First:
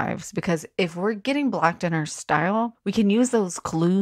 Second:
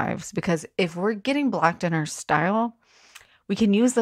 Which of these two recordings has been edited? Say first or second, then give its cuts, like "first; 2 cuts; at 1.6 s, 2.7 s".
first; 1 cut; at 2.8 s